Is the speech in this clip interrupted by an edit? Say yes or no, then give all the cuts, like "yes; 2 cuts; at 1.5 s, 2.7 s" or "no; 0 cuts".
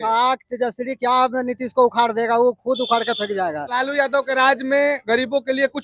yes; 1 cut; at 3.6 s